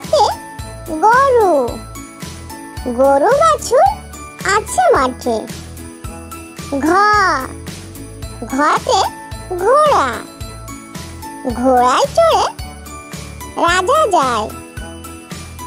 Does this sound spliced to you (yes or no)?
yes